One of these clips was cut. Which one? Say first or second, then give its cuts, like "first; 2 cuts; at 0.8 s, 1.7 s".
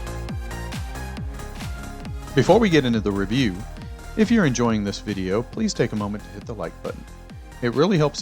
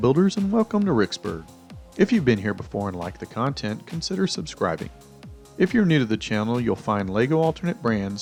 first; 1 cut; at 2.3 s